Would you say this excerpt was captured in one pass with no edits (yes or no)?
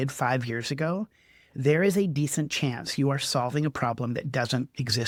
yes